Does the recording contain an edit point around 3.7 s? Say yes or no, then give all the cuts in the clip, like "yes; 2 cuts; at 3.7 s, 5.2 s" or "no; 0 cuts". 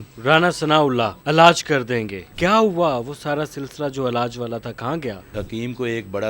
no; 1 cut; at 5.4 s